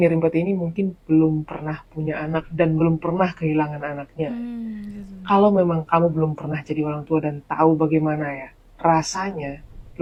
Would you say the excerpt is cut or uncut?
uncut